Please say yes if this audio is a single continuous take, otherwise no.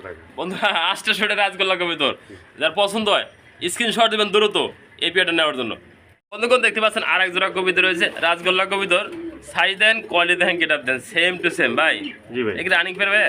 yes